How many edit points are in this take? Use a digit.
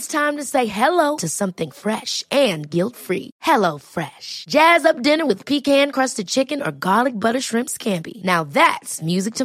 0